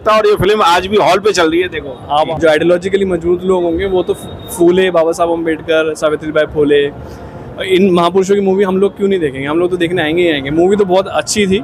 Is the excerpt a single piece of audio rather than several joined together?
no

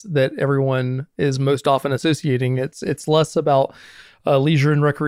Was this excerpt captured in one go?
yes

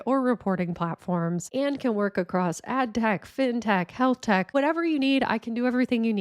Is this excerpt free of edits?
no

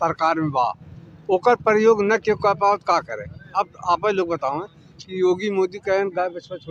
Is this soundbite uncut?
yes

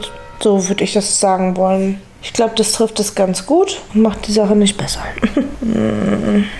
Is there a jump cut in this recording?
yes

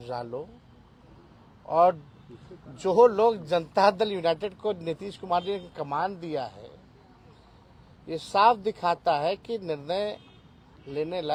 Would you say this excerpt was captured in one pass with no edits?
yes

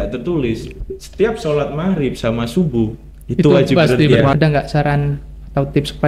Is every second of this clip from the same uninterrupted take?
no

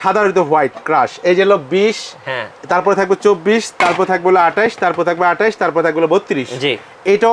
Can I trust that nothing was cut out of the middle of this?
yes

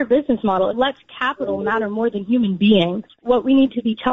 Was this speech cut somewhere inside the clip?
yes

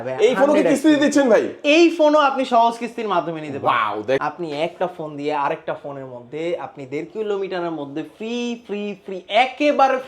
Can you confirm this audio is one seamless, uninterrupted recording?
no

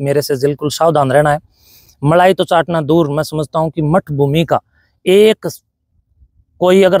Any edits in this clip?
no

